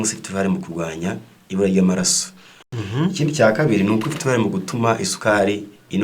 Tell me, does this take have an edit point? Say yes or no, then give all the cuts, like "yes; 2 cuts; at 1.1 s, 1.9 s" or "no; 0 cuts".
yes; 1 cut; at 2.7 s